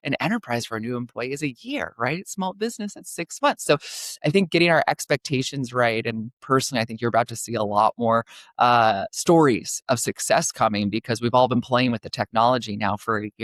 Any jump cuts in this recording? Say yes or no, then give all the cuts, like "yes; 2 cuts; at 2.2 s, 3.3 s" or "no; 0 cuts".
no; 0 cuts